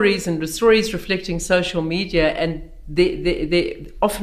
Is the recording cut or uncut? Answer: uncut